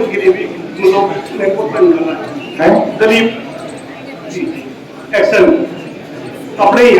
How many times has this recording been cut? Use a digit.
0